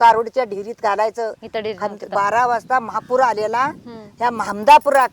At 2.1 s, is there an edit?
yes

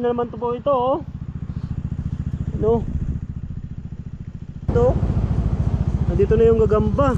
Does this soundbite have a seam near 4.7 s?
yes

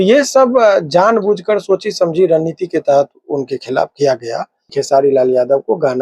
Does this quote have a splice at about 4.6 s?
yes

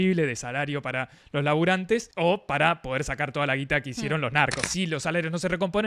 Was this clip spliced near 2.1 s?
yes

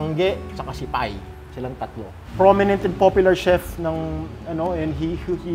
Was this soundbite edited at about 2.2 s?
yes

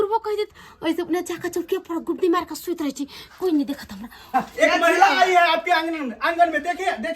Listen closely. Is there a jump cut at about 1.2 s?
no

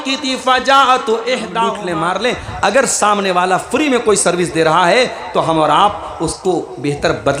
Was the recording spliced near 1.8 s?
yes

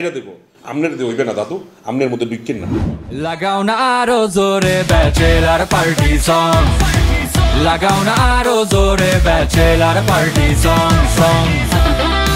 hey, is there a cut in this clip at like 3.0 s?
yes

